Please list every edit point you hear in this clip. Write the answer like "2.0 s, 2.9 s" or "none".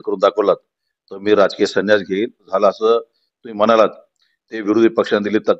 2.5 s